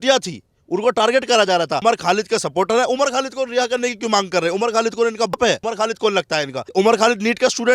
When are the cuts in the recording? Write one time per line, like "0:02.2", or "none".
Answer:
0:01.8
0:05.3
0:06.6

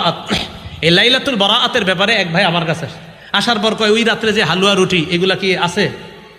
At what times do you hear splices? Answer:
none

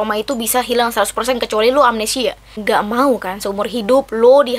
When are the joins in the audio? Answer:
0:02.5

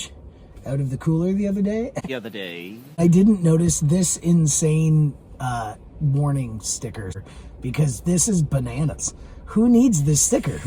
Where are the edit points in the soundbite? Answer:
0:02.3
0:07.2

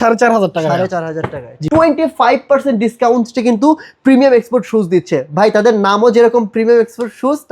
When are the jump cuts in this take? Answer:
0:01.5

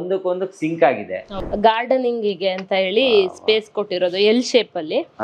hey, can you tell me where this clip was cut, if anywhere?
0:01.4

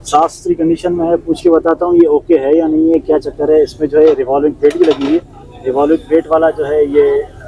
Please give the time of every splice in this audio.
none

